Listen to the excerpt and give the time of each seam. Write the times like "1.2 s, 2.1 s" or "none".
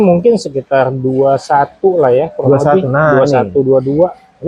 none